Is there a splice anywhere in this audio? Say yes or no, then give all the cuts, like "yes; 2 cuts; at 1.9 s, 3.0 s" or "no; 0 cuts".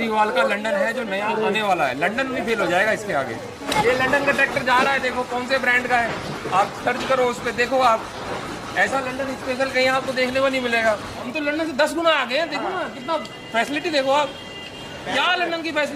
yes; 2 cuts; at 3.6 s, 11.3 s